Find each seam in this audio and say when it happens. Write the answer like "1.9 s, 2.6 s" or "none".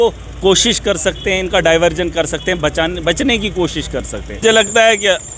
4.4 s